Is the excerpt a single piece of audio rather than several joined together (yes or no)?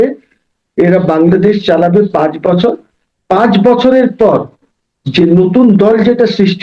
yes